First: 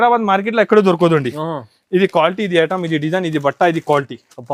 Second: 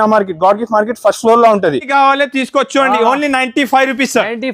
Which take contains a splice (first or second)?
second